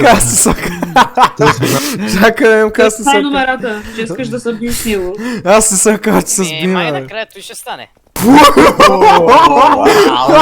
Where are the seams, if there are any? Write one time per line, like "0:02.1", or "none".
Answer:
0:01.7